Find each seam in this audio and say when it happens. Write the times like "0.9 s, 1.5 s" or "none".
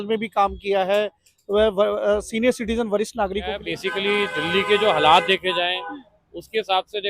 3.6 s